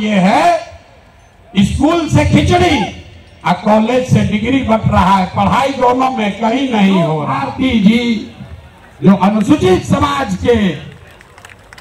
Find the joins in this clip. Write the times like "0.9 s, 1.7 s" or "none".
7.3 s